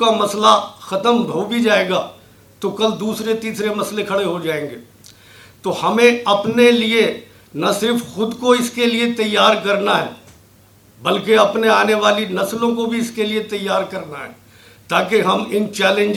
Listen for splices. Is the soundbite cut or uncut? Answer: uncut